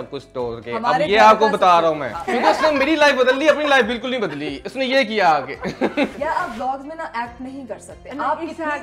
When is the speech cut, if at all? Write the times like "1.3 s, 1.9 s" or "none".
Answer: 2.2 s, 6.1 s